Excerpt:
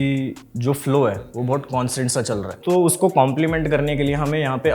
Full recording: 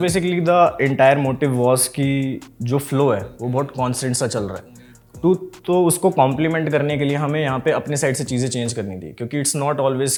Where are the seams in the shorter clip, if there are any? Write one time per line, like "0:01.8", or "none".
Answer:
0:02.5